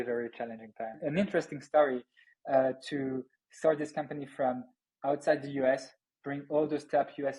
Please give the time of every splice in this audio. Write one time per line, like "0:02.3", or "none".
0:00.9